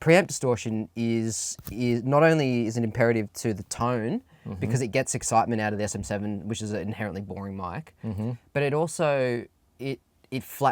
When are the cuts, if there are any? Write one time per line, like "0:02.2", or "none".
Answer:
none